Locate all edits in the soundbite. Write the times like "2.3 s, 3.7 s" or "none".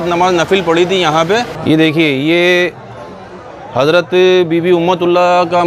1.5 s